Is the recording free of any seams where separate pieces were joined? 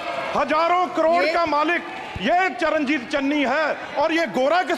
yes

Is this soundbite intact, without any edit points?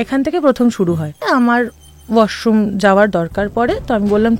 no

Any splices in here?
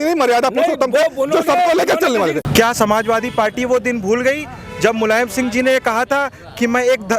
yes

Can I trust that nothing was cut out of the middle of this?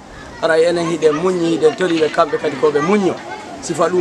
yes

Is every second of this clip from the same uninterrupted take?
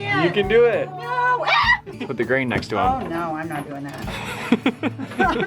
no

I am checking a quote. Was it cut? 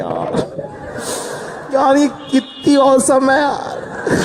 no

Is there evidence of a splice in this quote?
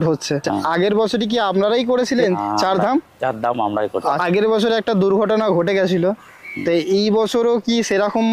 yes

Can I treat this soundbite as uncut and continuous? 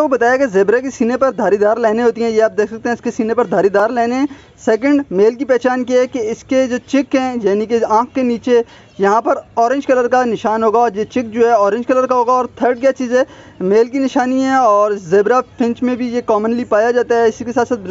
yes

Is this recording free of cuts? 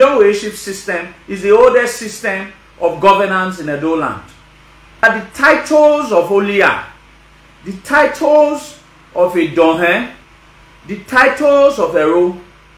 no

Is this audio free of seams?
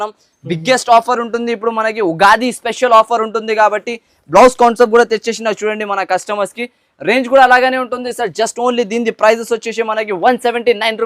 yes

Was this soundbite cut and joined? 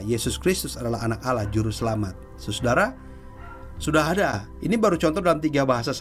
no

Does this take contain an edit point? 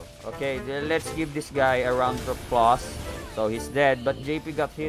yes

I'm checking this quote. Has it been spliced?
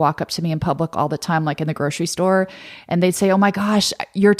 no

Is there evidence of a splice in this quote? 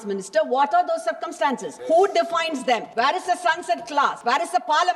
yes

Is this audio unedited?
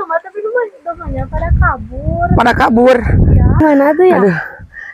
no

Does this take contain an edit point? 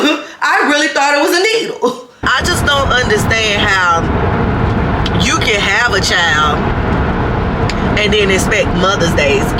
yes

